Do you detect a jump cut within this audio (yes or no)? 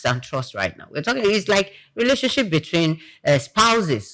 no